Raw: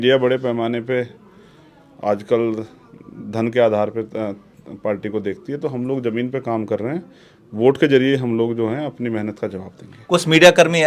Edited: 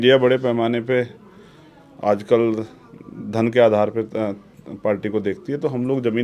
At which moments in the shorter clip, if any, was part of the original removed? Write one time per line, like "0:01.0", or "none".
none